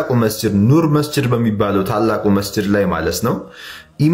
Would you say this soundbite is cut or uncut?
uncut